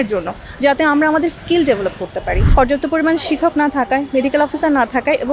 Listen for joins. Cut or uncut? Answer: cut